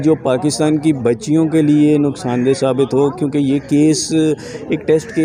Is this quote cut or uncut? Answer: uncut